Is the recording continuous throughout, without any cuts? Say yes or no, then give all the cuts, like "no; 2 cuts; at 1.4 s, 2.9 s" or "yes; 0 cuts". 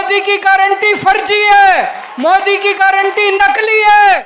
yes; 0 cuts